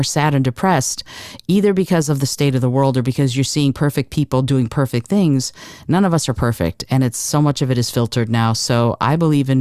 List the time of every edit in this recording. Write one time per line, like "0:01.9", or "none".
none